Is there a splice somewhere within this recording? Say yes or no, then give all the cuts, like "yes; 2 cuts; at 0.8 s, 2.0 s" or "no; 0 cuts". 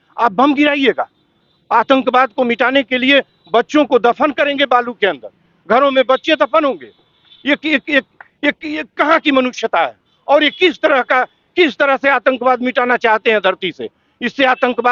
no; 0 cuts